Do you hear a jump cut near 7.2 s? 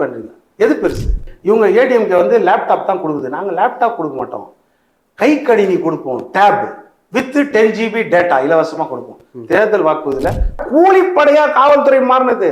no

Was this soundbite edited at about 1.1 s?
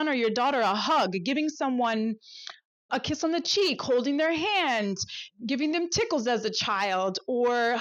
no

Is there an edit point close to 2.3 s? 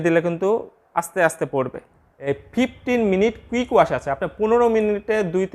yes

